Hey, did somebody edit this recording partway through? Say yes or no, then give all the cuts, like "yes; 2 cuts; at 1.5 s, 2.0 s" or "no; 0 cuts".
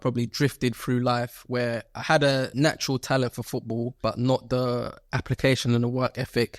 yes; 2 cuts; at 2.5 s, 3.9 s